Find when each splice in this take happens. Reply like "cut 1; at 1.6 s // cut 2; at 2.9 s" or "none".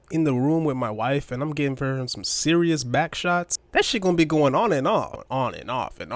cut 1; at 3.6 s // cut 2; at 5.2 s